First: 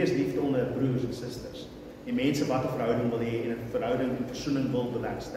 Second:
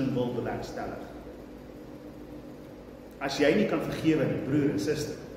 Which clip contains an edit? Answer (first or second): second